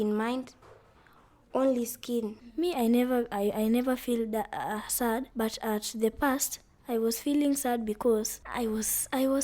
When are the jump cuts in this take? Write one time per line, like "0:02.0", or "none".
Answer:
0:02.4